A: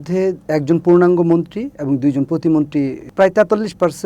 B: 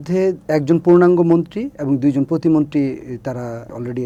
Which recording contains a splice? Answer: A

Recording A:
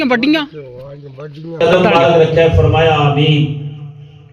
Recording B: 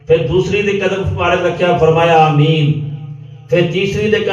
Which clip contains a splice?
A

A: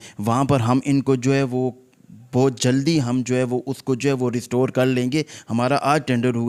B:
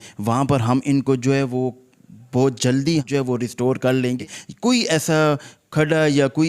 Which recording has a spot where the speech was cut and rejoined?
B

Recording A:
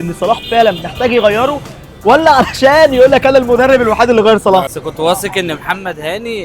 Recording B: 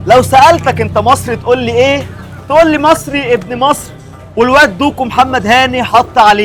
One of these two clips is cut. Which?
A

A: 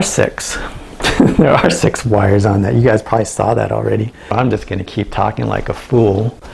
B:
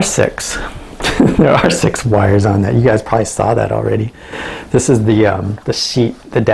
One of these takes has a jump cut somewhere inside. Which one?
A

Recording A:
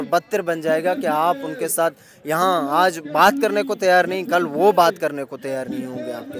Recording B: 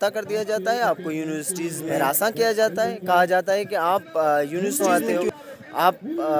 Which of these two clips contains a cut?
B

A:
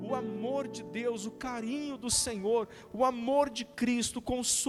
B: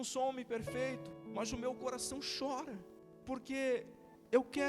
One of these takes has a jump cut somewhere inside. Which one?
B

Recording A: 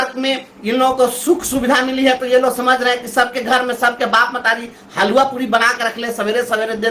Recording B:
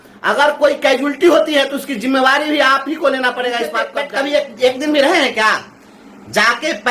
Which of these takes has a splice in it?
B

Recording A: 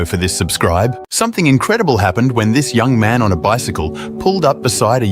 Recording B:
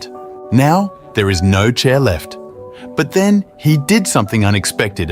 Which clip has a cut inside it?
A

